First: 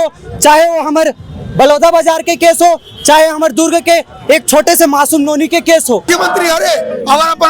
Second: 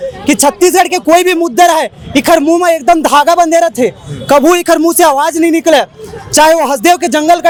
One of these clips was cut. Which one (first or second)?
first